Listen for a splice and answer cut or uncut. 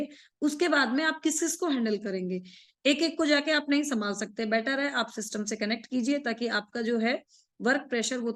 uncut